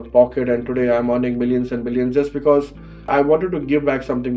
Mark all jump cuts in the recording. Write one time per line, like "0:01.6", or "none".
0:03.0